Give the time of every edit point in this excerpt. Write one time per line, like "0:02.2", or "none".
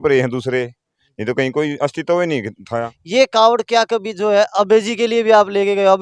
0:03.0